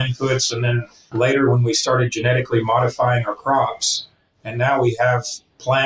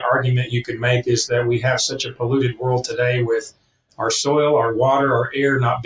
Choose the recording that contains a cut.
first; 1 cut; at 0.9 s

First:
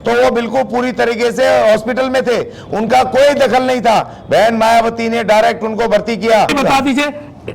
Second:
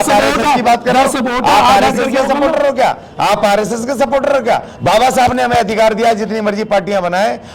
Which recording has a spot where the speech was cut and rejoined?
first; 1 cut; at 6.5 s

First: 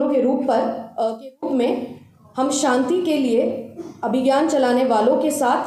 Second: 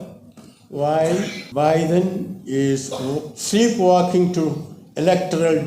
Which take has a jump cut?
second; 1 cut; at 1.4 s

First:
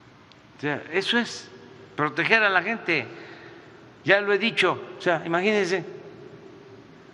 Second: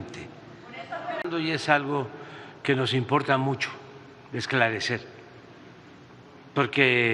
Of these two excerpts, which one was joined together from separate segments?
second; 1 cut; at 1.2 s

